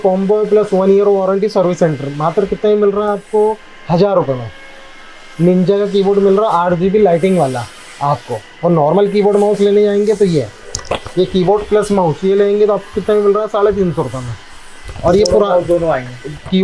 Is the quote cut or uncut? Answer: uncut